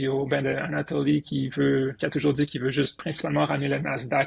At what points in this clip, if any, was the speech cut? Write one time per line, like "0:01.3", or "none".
0:02.0
0:03.0